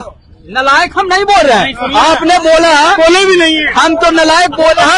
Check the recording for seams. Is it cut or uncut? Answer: uncut